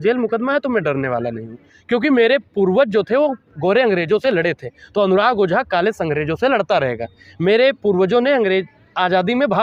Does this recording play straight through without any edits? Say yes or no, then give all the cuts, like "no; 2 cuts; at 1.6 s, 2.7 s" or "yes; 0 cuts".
yes; 0 cuts